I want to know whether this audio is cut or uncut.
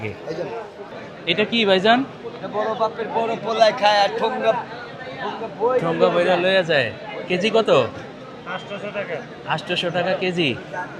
cut